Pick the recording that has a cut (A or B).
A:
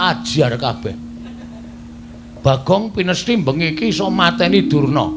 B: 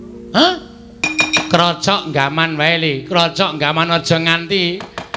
B